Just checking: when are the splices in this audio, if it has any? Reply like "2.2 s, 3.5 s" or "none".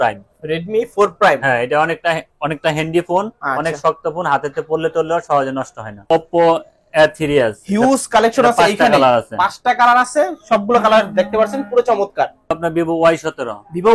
6.1 s, 12.6 s